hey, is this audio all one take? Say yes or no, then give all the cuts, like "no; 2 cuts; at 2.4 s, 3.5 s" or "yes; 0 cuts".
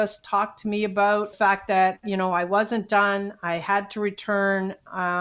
no; 1 cut; at 1.3 s